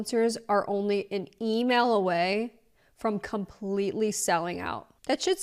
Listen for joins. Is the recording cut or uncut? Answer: uncut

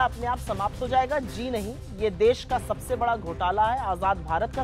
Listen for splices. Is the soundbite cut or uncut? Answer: uncut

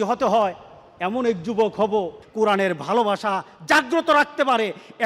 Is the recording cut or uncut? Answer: cut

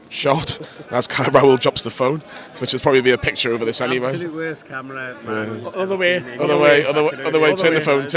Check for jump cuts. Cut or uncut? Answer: uncut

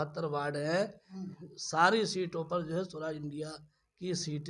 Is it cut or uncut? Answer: uncut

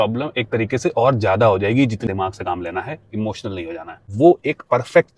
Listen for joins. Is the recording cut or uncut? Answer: cut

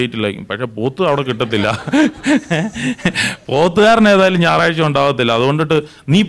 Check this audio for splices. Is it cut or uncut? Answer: uncut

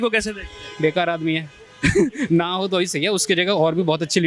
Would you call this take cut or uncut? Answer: uncut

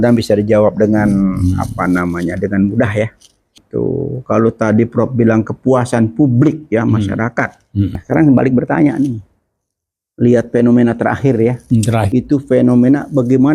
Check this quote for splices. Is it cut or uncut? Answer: cut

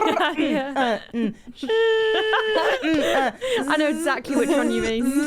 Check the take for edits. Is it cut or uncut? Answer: uncut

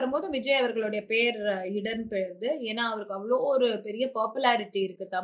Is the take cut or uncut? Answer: uncut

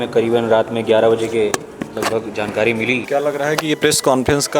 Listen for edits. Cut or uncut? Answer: cut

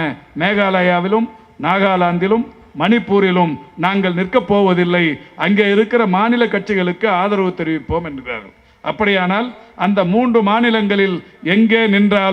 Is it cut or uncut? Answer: uncut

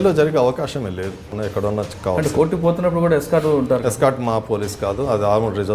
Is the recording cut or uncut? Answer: cut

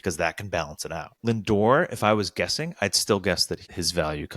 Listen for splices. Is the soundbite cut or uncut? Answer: cut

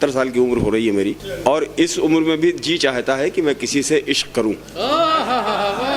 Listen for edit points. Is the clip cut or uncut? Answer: cut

